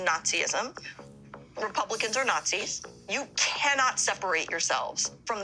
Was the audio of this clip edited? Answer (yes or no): yes